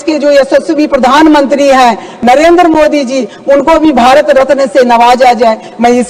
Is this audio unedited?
yes; 0 cuts

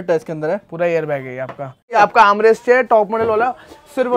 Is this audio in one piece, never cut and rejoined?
no; 1 cut; at 2.0 s

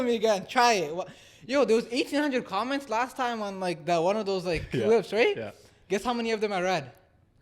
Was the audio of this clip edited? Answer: no; 0 cuts

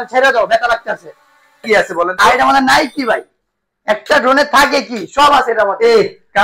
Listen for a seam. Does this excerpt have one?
yes; 1 cut; at 1.6 s

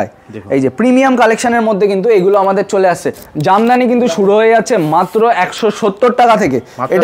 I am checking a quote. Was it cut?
yes; 1 cut; at 3.2 s

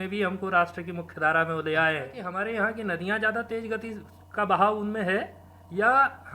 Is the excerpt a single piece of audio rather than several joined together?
no; 1 cut; at 2.2 s

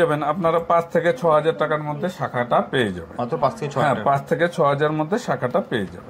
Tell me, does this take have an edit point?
no; 0 cuts

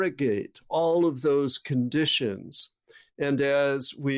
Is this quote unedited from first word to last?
yes; 0 cuts

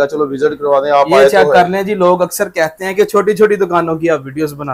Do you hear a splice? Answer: no; 0 cuts

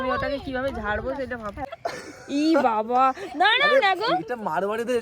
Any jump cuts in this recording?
yes; 1 cut; at 1.7 s

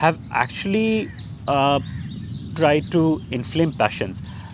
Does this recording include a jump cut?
no; 0 cuts

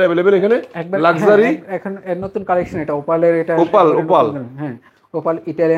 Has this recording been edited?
no; 0 cuts

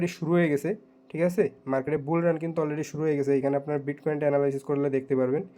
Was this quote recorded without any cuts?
yes; 0 cuts

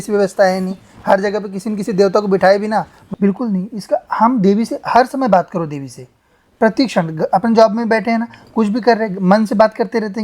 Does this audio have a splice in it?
yes; 1 cut; at 3.0 s

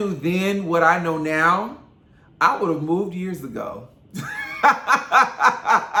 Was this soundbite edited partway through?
no; 0 cuts

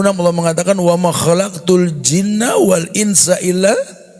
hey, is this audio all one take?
yes; 0 cuts

